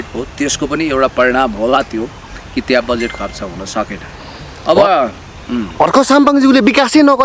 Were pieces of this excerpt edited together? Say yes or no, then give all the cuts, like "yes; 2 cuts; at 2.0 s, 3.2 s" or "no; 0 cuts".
no; 0 cuts